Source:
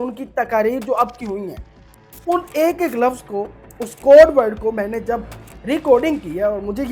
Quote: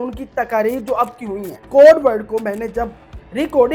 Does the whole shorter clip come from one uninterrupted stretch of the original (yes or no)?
no